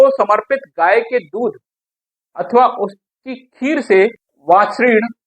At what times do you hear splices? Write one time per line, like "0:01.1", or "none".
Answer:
0:04.3

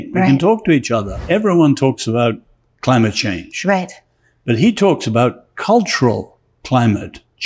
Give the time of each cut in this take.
0:01.2

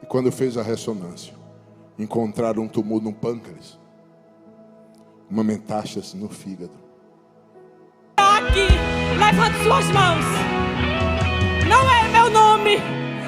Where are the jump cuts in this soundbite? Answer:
0:08.2

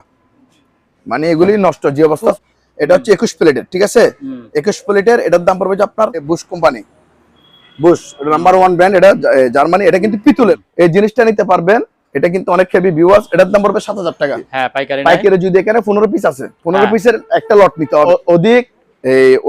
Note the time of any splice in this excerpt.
0:02.3
0:06.2
0:10.6
0:14.5
0:18.1

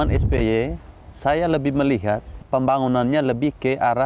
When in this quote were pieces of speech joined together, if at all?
0:02.4

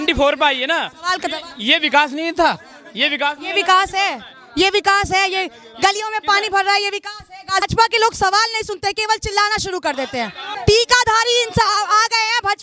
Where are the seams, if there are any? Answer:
0:07.7
0:10.6

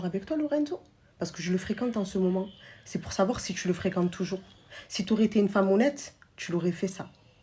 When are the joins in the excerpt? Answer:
none

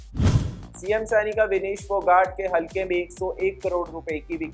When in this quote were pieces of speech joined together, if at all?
none

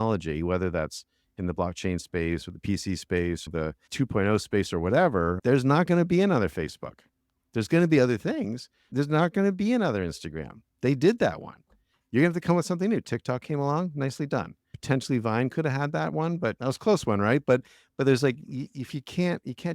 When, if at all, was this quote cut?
0:03.5
0:05.4
0:08.9

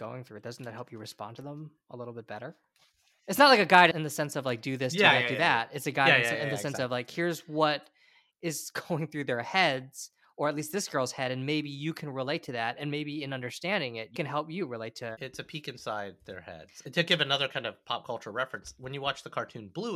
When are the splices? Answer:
none

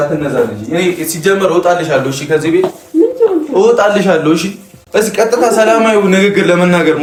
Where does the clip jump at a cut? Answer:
none

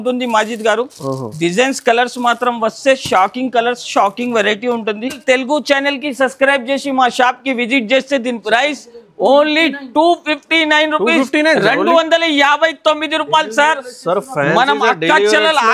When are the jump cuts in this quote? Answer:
0:05.2

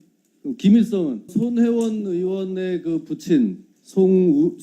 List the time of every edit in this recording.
0:01.3

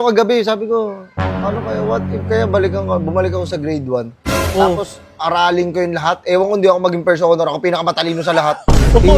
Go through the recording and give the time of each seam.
none

